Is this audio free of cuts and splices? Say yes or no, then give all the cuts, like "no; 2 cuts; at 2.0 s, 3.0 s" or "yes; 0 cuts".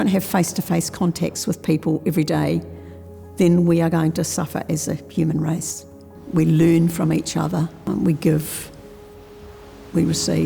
no; 1 cut; at 7.8 s